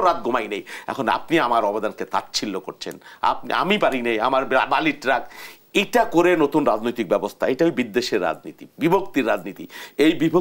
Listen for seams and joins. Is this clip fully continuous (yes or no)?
yes